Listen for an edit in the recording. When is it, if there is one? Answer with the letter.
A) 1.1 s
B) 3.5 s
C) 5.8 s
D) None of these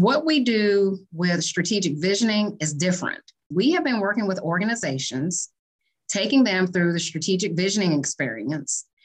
B